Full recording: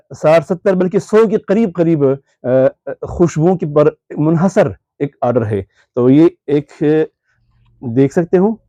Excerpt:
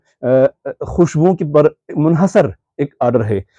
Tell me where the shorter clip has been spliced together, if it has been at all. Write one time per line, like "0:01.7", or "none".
none

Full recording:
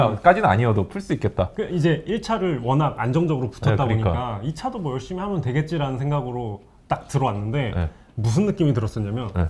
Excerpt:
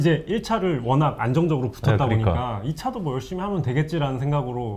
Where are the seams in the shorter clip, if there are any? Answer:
none

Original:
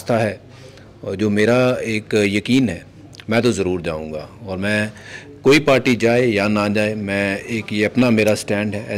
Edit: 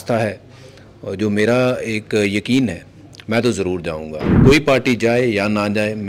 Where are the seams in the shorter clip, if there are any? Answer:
0:04.3

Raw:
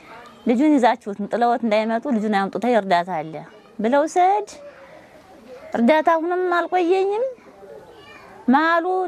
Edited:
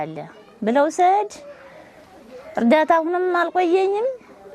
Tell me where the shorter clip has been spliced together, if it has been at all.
none

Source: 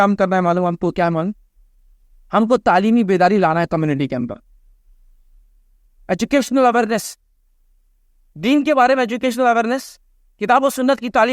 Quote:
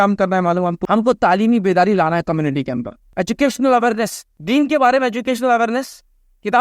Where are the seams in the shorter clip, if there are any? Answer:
0:00.8
0:03.0
0:04.3

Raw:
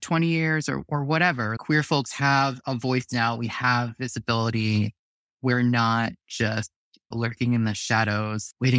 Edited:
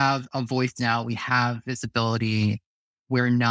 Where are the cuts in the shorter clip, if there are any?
none

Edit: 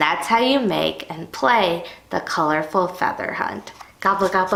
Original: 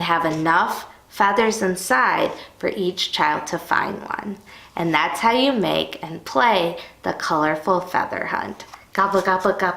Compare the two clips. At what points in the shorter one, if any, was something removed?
none

